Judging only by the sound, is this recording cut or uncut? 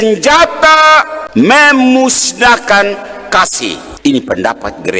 cut